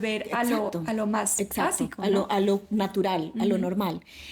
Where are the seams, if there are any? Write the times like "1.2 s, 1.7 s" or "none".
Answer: none